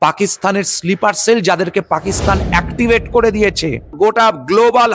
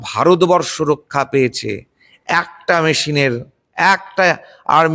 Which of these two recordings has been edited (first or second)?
first